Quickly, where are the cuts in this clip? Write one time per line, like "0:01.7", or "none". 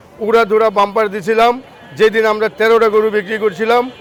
none